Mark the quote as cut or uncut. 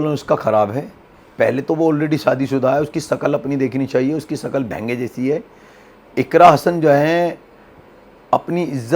uncut